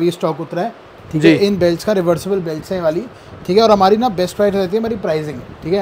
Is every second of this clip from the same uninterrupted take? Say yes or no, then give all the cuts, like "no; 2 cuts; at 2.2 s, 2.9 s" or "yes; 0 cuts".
yes; 0 cuts